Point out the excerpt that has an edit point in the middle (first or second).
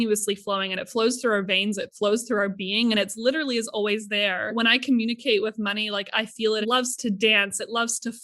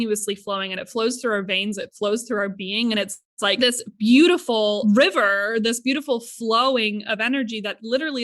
first